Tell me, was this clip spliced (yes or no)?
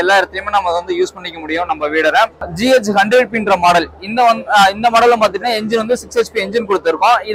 yes